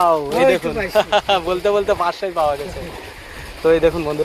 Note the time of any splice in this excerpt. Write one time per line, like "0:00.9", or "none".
none